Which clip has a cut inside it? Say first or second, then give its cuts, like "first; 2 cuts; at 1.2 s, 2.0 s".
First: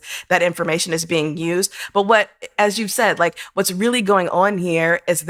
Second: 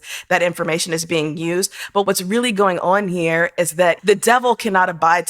second; 2 cuts; at 2.1 s, 4.0 s